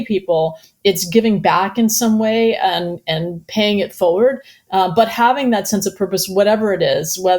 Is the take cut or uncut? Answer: uncut